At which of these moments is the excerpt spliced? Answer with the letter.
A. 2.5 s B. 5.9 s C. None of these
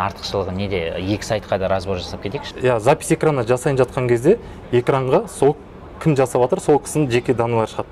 A